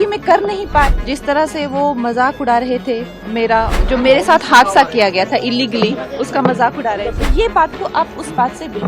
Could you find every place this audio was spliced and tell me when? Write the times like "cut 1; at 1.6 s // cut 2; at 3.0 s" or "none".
cut 1; at 1.0 s // cut 2; at 3.7 s